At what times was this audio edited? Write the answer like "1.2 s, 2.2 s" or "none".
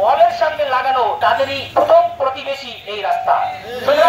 1.4 s